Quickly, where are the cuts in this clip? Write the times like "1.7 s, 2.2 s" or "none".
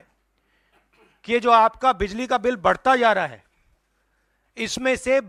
none